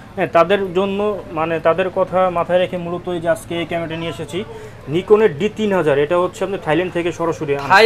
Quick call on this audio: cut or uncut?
uncut